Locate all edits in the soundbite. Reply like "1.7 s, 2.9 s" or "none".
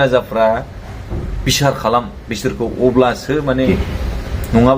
3.7 s